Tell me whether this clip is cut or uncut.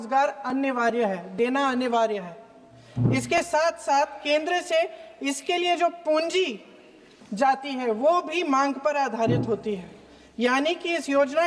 uncut